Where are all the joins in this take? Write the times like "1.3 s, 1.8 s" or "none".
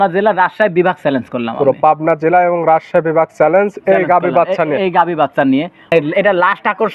5.9 s